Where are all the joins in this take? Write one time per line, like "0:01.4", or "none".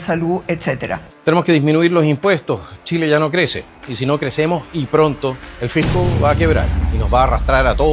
0:01.1